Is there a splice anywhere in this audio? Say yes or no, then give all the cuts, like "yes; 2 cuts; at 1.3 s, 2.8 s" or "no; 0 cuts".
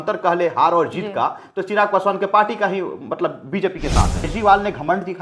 yes; 1 cut; at 4.3 s